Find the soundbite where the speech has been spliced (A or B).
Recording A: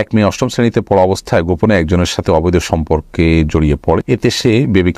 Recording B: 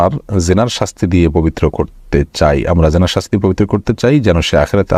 A